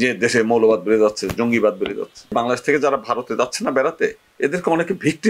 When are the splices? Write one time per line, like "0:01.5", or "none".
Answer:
0:02.3